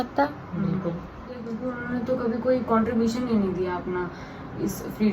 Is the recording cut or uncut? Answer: cut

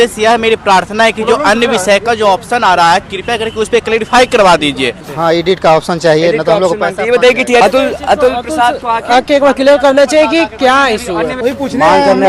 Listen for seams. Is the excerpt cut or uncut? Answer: cut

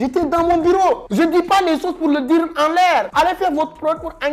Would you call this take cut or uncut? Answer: uncut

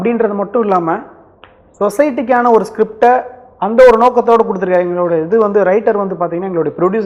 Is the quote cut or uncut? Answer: uncut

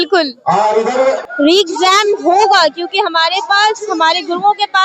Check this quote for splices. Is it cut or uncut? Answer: cut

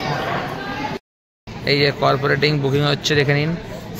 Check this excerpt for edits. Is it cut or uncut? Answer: cut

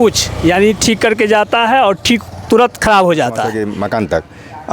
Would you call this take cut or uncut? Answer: cut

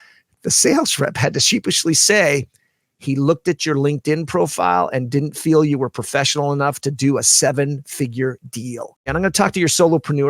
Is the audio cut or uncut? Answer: cut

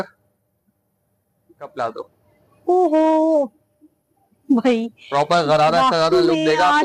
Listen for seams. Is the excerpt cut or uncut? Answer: cut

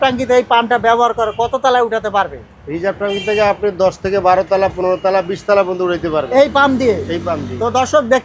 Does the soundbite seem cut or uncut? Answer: uncut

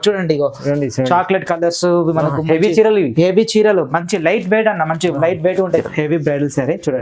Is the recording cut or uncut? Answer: cut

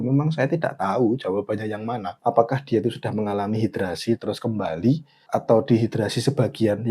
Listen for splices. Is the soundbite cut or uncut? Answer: cut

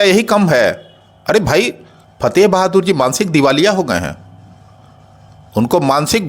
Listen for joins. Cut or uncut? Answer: uncut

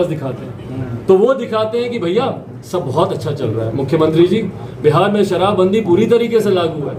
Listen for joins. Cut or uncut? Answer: uncut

